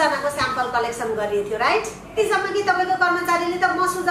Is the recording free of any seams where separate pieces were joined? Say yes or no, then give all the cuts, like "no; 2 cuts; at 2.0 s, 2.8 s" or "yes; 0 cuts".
no; 1 cut; at 2.1 s